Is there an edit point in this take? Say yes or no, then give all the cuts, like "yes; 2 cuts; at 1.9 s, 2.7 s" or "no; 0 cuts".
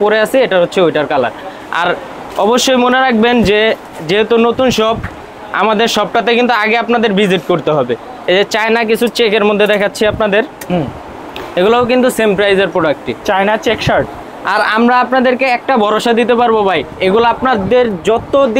no; 0 cuts